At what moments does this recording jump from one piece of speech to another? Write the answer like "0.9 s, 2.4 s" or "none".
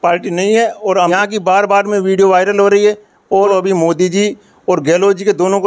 1.1 s, 3.5 s